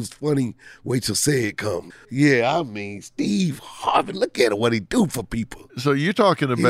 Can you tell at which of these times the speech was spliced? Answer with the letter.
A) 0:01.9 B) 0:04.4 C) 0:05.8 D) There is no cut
A